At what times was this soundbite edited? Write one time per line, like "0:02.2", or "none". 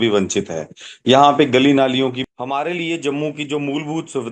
0:02.2